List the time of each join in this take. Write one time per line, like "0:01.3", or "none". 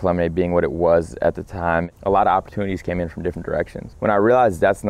0:03.8